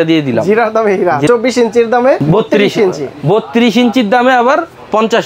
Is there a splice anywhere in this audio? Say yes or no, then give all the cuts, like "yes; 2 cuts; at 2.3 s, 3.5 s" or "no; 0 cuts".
yes; 2 cuts; at 1.3 s, 2.2 s